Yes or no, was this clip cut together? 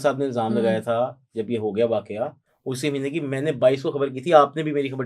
no